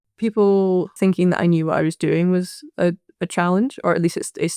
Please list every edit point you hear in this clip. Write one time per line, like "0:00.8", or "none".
0:00.9